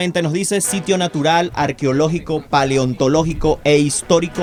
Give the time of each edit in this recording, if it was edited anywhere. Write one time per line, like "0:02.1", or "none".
none